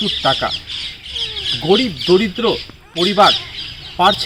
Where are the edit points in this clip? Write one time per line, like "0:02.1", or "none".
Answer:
none